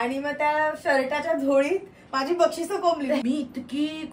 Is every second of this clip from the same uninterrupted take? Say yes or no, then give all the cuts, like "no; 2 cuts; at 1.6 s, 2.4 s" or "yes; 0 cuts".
no; 1 cut; at 3.2 s